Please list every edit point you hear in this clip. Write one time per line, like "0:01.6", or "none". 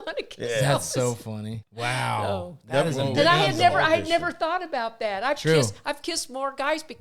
0:01.6